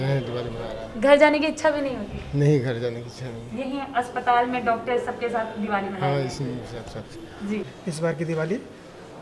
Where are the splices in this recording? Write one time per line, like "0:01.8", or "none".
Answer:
0:07.7